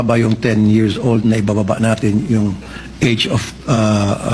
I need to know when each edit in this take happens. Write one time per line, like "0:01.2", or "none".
none